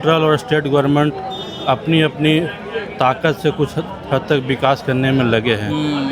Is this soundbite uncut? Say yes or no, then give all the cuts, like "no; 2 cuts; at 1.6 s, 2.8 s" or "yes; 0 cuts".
yes; 0 cuts